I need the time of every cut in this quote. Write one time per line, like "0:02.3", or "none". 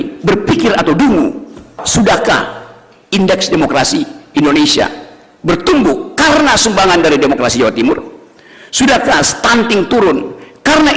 0:01.8